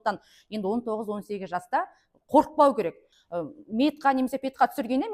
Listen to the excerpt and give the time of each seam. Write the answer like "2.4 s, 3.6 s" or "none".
3.1 s

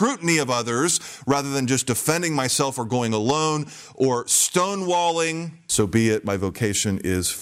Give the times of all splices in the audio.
5.6 s

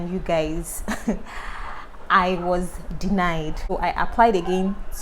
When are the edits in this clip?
3.6 s

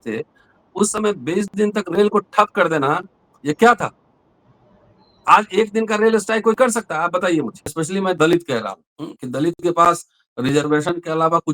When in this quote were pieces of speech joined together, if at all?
7.7 s

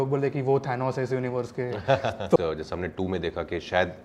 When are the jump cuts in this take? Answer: 2.4 s

